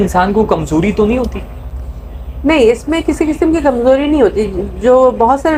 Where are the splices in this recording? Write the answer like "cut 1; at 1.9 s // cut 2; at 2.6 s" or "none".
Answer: none